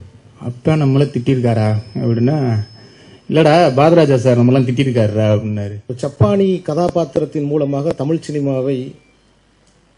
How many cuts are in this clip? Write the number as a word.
one